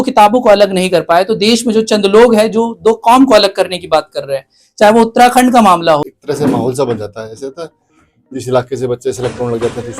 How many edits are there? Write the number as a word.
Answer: one